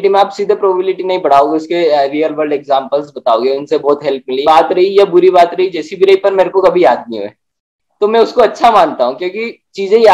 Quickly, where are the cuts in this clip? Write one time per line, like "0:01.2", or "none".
0:04.4